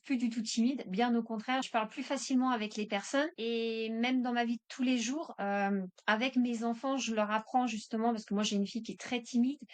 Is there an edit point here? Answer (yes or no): yes